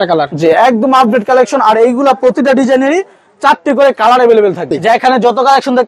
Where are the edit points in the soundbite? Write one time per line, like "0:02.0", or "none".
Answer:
0:04.7